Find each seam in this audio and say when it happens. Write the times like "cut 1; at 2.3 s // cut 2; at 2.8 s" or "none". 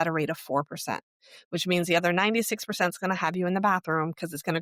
none